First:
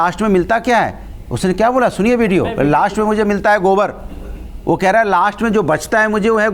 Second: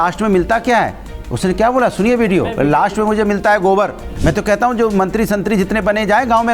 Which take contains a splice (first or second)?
second